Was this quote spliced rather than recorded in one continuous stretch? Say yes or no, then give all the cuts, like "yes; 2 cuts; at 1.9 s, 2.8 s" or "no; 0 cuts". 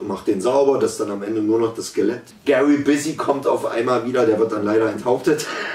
yes; 1 cut; at 2.3 s